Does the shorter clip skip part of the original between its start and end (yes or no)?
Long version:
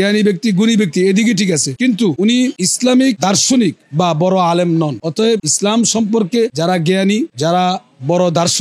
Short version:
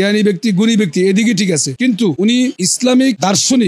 no